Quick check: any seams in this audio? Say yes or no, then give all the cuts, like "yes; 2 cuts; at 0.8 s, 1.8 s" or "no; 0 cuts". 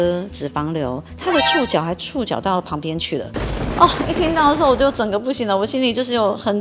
no; 0 cuts